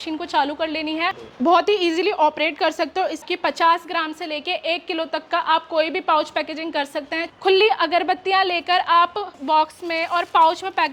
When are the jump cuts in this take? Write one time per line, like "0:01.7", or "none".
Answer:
0:03.2
0:07.2
0:09.4